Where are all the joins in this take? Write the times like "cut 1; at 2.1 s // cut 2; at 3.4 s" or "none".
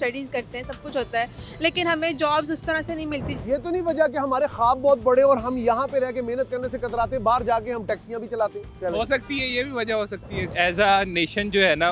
cut 1; at 3.3 s // cut 2; at 8.7 s // cut 3; at 10.5 s